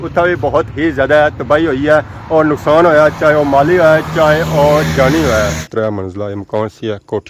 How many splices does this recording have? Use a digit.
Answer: 1